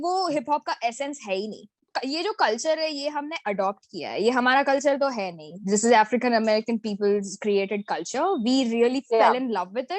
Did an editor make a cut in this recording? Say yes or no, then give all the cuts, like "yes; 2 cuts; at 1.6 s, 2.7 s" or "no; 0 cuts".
yes; 1 cut; at 1.9 s